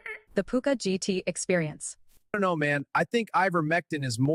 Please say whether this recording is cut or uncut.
uncut